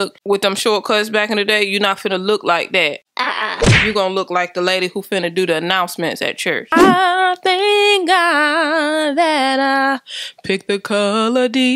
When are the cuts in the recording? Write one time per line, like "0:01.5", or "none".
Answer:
0:06.7